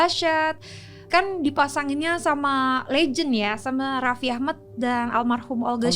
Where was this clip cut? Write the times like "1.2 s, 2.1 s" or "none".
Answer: 1.0 s